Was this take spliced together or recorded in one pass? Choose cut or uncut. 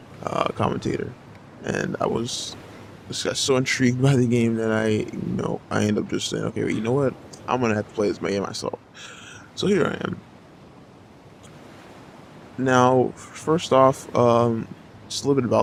uncut